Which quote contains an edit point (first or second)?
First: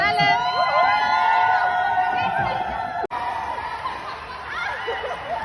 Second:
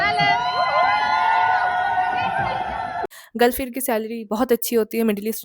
second